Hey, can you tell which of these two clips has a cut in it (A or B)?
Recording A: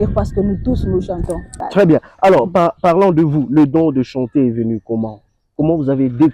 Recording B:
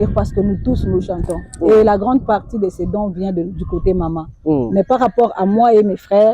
A